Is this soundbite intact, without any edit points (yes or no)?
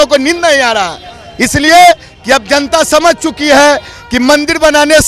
yes